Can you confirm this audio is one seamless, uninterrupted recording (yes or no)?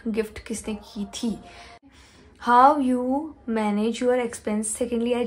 no